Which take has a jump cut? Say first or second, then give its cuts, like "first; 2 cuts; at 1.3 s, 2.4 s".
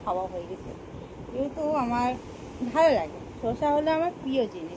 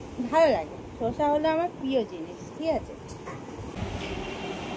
second; 1 cut; at 3.8 s